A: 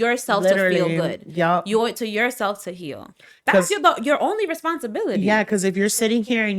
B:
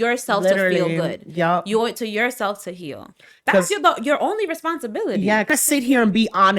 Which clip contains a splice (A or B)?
B